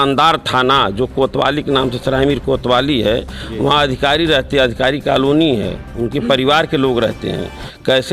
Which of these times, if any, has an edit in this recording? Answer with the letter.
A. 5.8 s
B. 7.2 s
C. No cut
C